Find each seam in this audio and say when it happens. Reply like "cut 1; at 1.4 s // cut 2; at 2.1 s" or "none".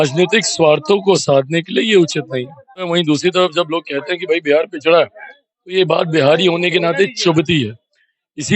cut 1; at 3.1 s